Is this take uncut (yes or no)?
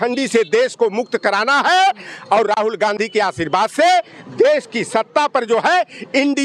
yes